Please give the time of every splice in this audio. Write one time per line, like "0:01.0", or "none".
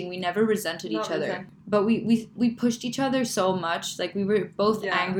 none